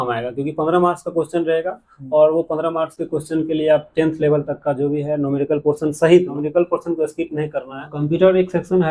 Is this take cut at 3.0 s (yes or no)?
no